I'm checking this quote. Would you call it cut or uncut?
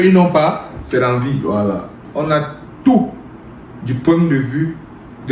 cut